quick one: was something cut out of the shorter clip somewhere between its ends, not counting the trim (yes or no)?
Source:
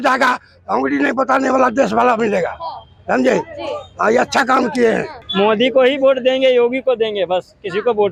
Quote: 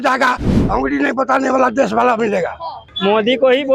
yes